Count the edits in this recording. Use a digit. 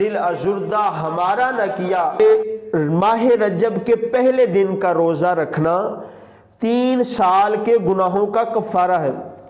1